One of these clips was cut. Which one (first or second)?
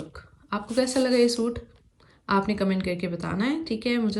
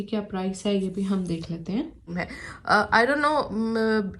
second